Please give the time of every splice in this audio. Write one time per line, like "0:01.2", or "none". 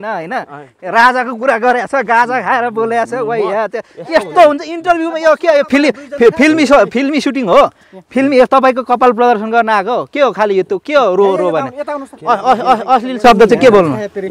none